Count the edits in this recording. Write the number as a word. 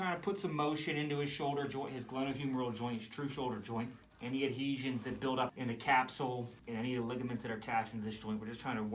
three